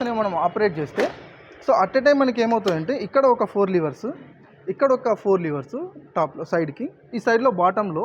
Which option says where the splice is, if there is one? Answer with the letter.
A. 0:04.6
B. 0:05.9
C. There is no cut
C